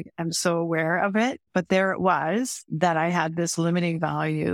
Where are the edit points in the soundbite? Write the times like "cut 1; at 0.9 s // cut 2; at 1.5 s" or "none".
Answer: cut 1; at 1.4 s // cut 2; at 2.6 s